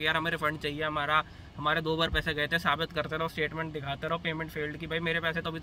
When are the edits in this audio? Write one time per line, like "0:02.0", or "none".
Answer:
none